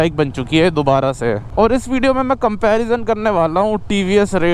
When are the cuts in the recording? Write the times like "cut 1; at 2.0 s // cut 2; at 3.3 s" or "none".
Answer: cut 1; at 1.4 s

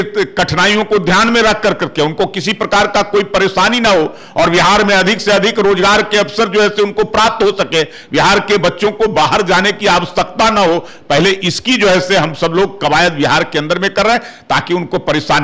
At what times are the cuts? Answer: none

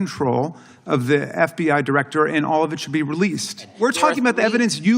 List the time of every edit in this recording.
cut 1; at 3.7 s

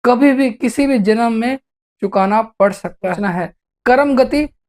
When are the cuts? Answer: cut 1; at 3.2 s

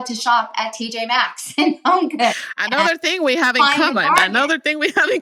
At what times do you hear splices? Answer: none

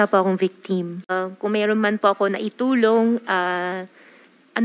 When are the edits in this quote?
cut 1; at 1.1 s

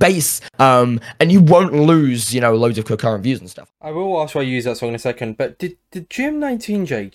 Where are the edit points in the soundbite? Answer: cut 1; at 3.5 s

